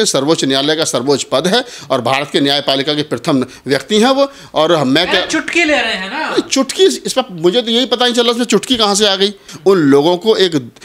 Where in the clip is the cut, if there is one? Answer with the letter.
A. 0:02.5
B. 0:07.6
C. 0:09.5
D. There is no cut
C